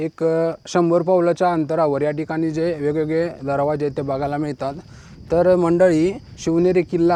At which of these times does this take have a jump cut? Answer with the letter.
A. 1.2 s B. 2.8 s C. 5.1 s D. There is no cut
D